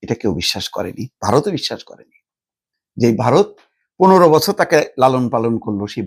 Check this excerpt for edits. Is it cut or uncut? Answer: uncut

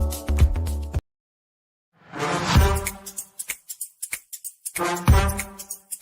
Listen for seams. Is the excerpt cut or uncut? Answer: cut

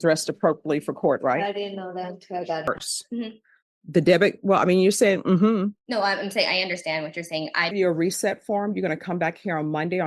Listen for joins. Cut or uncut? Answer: cut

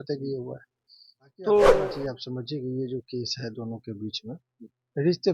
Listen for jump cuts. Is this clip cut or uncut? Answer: cut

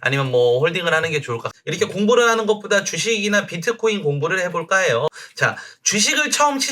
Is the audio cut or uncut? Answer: cut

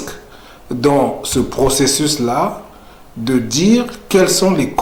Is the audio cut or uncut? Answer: uncut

